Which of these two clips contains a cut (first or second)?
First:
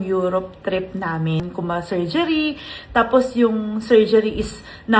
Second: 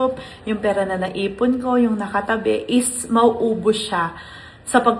first